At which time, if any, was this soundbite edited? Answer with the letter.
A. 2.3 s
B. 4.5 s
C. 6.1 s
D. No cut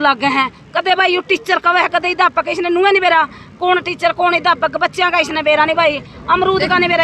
D